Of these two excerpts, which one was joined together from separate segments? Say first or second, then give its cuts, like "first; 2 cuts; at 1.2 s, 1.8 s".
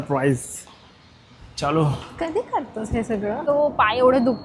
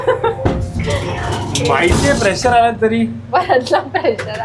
first; 1 cut; at 3.4 s